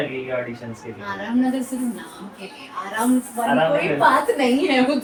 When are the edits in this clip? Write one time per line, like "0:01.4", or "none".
none